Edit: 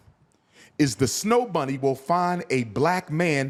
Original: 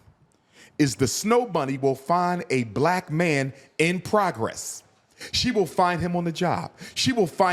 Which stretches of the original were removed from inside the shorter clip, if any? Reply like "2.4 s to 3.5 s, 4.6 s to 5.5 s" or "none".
none